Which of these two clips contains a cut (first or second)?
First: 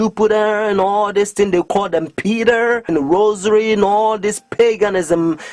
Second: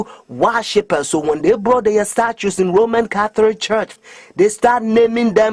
second